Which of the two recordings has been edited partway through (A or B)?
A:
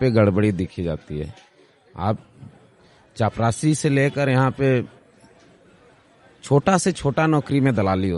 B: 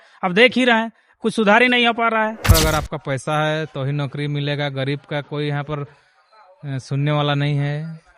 B